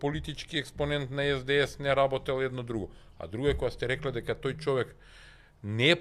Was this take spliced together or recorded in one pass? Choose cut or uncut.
uncut